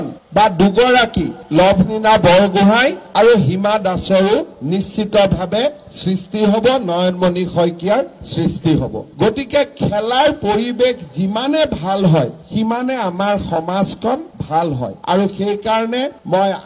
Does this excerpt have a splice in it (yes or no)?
no